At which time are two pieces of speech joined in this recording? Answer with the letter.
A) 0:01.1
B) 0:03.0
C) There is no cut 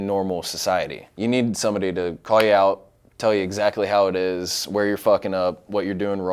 A